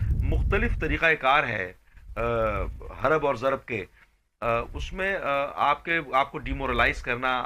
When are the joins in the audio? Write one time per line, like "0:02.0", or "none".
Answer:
none